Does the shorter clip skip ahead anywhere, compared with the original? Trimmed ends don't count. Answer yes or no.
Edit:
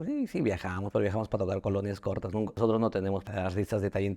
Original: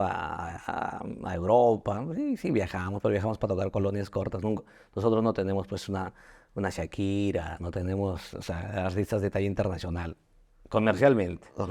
yes